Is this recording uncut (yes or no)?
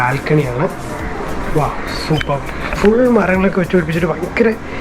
yes